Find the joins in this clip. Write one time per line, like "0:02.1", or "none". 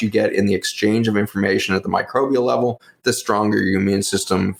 none